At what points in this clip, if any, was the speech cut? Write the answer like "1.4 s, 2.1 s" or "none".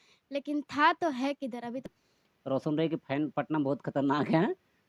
2.0 s

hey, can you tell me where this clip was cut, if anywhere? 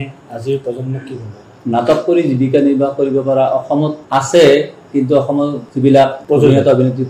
4.0 s, 5.6 s, 6.2 s

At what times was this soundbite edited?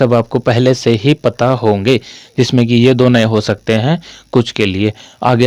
none

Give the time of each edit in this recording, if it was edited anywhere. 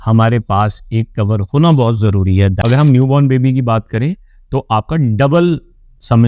2.6 s

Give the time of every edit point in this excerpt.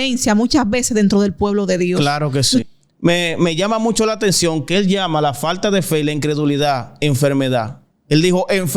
2.6 s

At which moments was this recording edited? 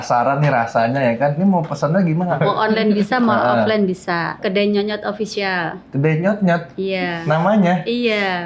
2.3 s, 4.3 s

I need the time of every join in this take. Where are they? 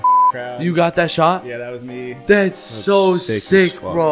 none

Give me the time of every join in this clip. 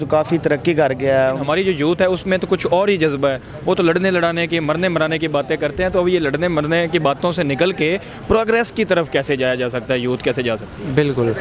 1.4 s

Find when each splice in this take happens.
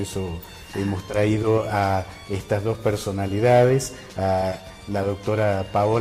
4.5 s

